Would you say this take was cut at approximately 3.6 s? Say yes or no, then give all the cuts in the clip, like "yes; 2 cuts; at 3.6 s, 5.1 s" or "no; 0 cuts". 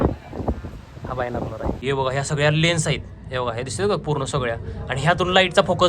no; 1 cut; at 1.8 s